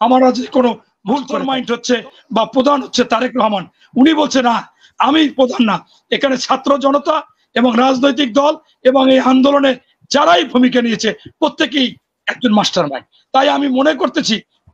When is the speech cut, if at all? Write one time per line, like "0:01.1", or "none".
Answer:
0:01.3